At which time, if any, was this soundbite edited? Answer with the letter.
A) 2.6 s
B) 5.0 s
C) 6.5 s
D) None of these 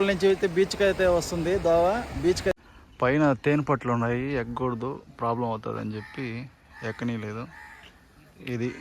A